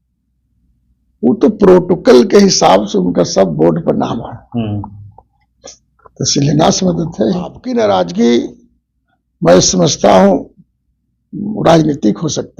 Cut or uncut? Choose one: cut